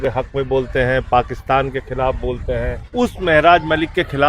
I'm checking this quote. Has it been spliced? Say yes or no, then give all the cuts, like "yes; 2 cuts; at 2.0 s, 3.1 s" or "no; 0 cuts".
yes; 1 cut; at 2.8 s